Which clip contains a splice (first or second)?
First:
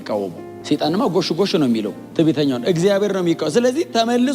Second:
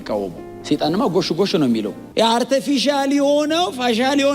second